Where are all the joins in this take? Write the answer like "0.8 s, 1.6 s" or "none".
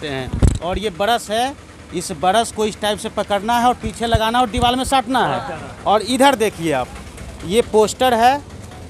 none